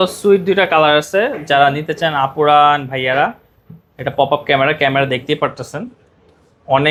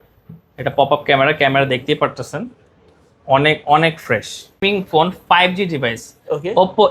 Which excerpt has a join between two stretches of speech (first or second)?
second